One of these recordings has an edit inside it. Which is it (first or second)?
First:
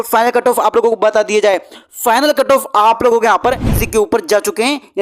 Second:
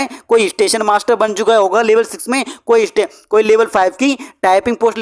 first